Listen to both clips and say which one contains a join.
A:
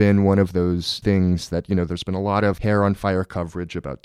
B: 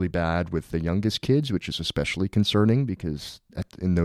A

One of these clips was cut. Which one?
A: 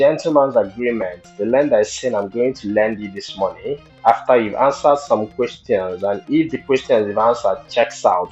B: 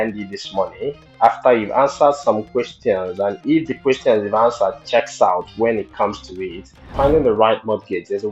B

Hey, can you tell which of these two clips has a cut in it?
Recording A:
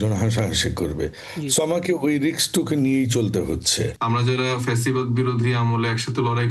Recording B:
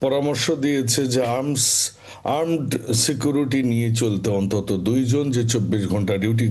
A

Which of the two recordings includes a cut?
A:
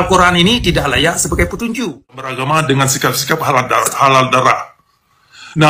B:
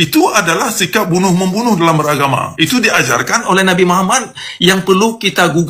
A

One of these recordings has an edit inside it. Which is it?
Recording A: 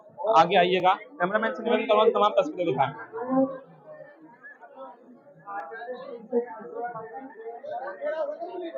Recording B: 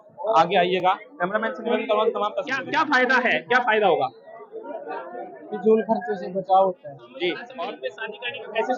B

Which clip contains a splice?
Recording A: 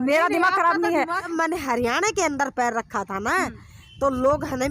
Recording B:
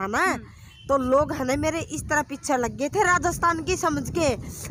A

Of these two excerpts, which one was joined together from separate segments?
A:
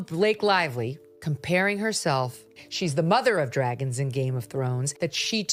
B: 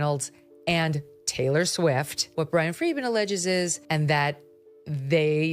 B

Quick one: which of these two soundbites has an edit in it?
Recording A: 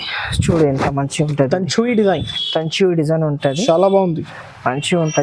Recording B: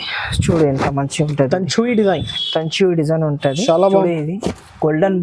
B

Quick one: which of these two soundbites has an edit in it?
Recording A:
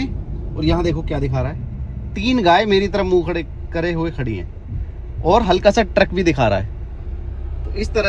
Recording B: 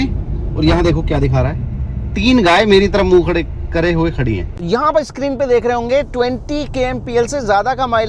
B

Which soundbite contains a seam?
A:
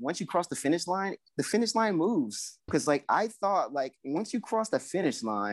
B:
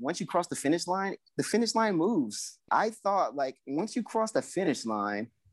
B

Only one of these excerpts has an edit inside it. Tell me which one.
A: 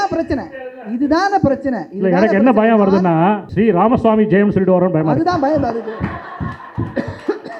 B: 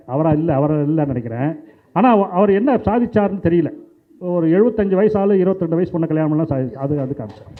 A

